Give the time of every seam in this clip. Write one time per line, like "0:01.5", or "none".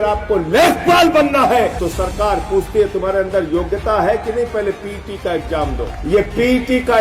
0:01.8
0:05.9